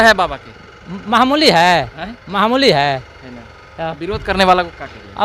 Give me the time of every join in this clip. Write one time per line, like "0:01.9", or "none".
none